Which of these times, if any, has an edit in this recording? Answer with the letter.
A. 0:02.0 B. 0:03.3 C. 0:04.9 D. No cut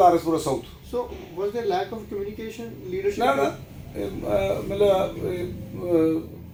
D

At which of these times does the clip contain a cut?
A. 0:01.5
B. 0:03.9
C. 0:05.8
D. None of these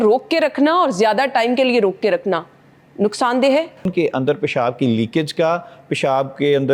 B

